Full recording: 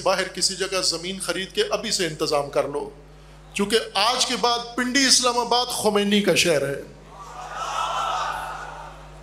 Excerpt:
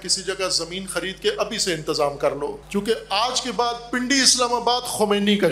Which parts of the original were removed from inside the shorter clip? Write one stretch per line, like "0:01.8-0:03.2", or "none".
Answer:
0:02.9-0:03.5